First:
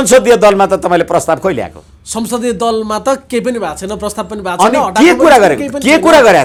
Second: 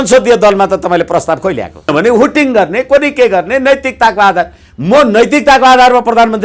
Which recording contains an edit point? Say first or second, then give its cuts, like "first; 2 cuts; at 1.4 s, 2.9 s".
second; 1 cut; at 1.9 s